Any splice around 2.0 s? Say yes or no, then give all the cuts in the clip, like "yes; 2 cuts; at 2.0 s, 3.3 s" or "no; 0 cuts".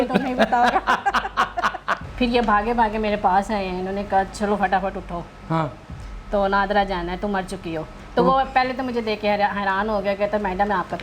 yes; 2 cuts; at 2.0 s, 8.0 s